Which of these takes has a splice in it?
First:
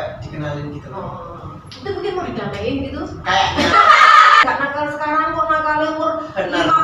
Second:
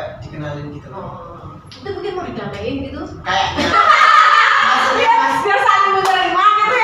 first; 1 cut; at 4.4 s

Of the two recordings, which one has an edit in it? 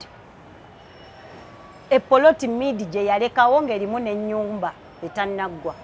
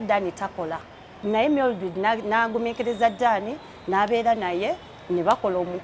second; 1 cut; at 1.2 s

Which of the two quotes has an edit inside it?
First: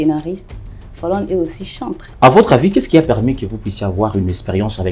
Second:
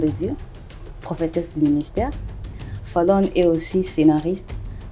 first; 1 cut; at 2.0 s

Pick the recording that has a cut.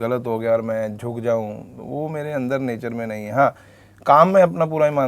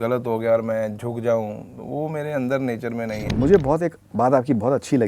second; 1 cut; at 3.3 s

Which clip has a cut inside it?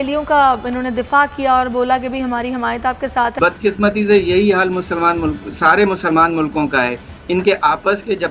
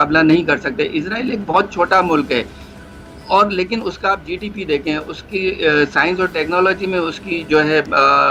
first; 1 cut; at 3.4 s

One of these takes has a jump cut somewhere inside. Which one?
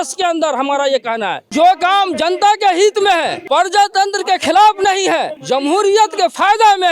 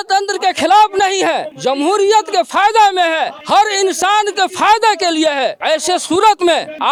first; 1 cut; at 1.5 s

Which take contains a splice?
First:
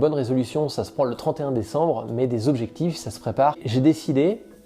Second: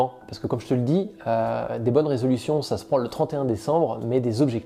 first; 1 cut; at 3.6 s

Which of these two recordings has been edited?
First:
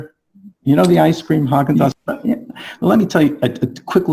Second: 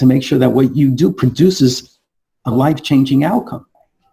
first; 1 cut; at 1.9 s

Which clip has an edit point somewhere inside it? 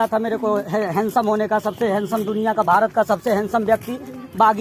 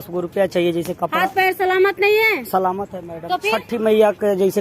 second; 1 cut; at 2.7 s

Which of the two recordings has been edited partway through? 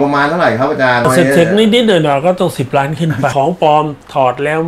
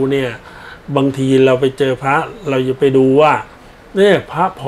first; 2 cuts; at 1.0 s, 3.3 s

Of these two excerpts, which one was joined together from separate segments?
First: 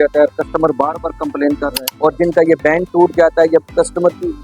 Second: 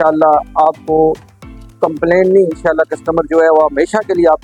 first; 1 cut; at 1.8 s

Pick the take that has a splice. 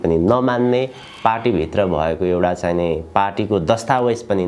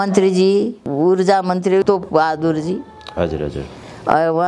second; 2 cuts; at 0.8 s, 1.8 s

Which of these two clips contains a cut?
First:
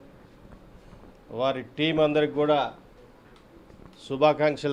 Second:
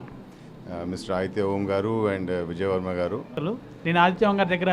second; 1 cut; at 3.4 s

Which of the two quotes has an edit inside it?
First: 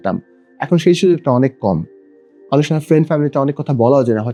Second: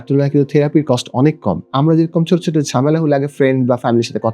second; 1 cut; at 1.7 s

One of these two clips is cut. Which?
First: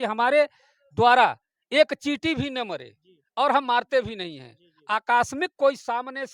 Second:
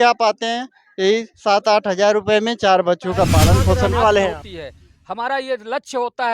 second; 1 cut; at 4.4 s

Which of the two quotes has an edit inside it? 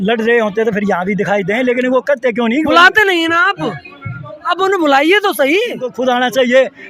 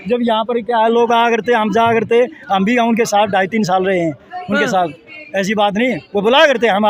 first; 1 cut; at 5.9 s

